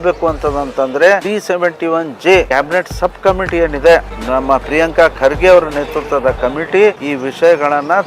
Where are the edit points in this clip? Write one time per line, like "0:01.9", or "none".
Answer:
0:01.2
0:02.5
0:04.2
0:07.1